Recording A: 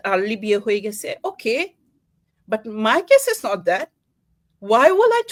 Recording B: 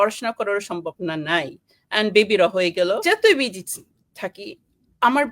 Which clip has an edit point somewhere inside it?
B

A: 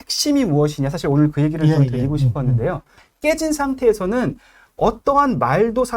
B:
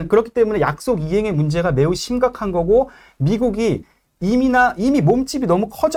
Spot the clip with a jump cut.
A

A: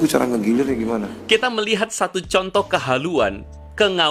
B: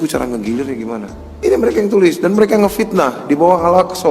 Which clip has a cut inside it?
B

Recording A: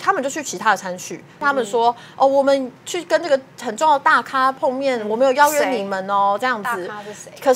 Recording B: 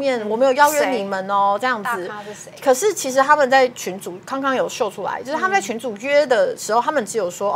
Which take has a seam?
A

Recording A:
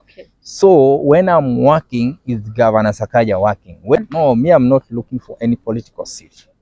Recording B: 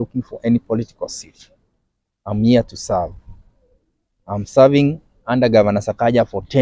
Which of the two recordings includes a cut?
A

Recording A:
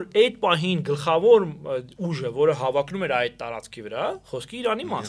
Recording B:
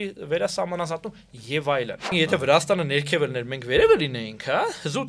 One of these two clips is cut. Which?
B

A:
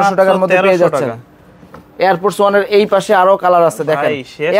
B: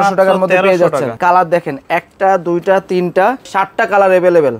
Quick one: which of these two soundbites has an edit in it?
B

